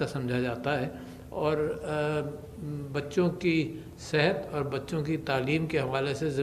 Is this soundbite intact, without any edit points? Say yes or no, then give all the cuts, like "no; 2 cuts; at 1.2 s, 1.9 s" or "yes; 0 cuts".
yes; 0 cuts